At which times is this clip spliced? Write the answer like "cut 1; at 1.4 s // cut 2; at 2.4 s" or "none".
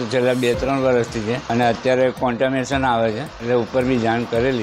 cut 1; at 1.4 s // cut 2; at 3.3 s